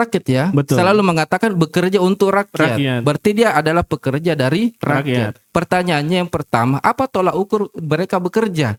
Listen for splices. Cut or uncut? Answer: uncut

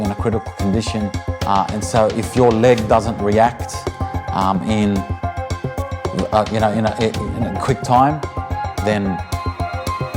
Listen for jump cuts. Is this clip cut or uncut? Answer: cut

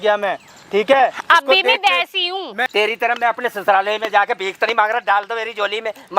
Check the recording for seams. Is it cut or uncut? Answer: cut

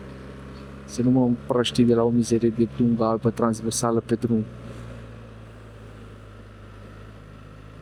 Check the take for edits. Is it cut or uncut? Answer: uncut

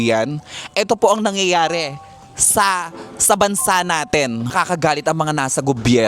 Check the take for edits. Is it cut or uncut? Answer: cut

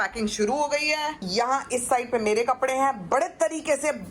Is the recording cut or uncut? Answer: cut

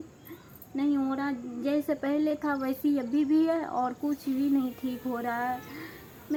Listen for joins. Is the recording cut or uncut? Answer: uncut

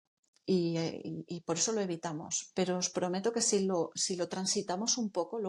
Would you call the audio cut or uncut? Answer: uncut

